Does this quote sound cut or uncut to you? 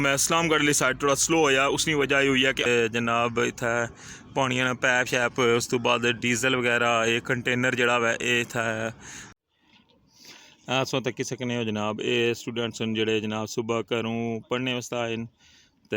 cut